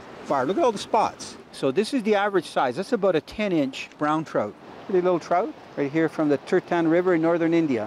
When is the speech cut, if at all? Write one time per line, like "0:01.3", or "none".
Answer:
0:01.2
0:04.3
0:05.6